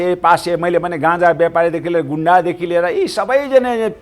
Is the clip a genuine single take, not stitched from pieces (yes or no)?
yes